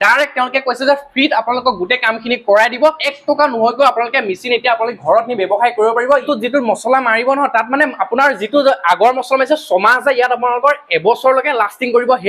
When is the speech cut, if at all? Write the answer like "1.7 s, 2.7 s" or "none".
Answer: 3.0 s, 6.2 s